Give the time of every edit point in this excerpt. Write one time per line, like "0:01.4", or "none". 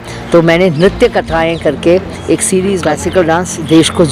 0:02.8

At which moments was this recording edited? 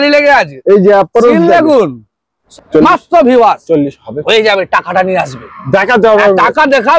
0:02.4

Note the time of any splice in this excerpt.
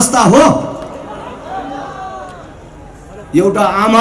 none

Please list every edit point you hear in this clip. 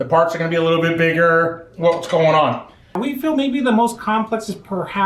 0:03.0

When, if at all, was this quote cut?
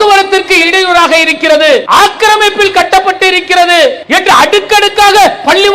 0:01.8
0:04.0

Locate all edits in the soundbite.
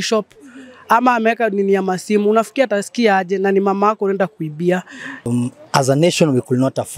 0:05.3

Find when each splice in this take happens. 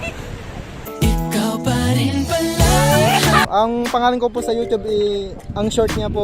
0:03.5

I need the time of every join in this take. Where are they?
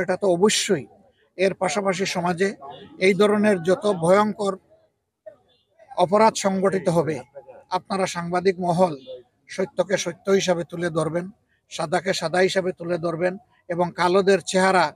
none

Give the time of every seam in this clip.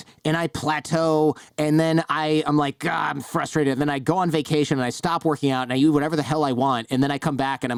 none

